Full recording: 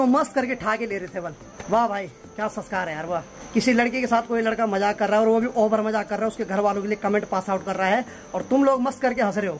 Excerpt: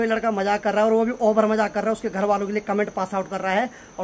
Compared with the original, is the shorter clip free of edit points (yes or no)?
yes